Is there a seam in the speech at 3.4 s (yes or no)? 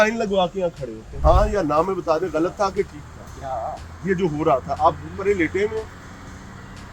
no